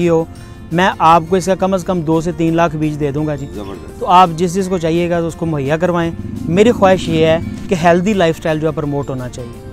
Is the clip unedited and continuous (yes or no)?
yes